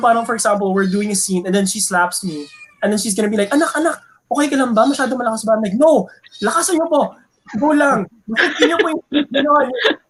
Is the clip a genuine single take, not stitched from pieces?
yes; 0 cuts

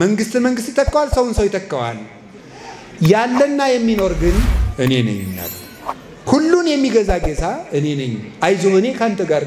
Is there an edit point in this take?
no; 0 cuts

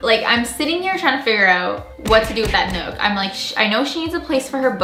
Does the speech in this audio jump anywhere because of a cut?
no; 0 cuts

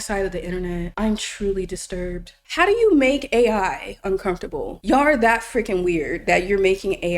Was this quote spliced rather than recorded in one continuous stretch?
yes; 3 cuts; at 0.9 s, 2.4 s, 4.7 s

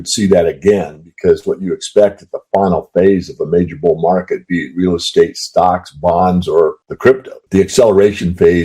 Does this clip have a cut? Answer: yes; 1 cut; at 7.3 s

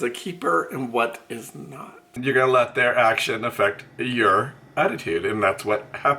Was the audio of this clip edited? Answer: yes; 1 cut; at 2.1 s

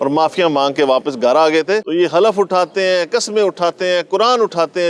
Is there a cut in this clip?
yes; 1 cut; at 1.8 s

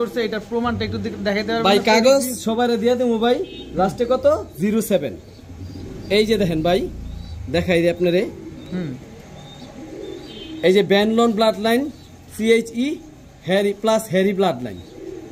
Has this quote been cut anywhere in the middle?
no; 0 cuts

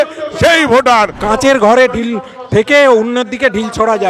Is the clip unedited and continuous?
no; 1 cut; at 0.9 s

